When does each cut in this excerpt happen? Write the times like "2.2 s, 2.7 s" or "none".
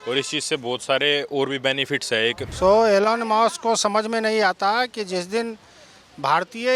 2.5 s